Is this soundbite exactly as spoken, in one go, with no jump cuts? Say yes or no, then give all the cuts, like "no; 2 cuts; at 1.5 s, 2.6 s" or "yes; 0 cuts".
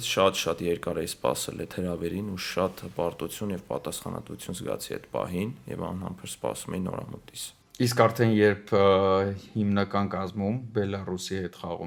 yes; 0 cuts